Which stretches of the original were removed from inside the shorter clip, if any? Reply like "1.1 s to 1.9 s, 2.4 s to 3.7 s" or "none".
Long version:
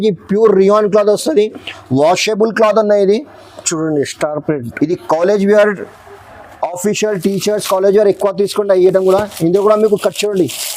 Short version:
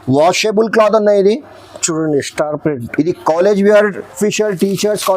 5.9 s to 6.7 s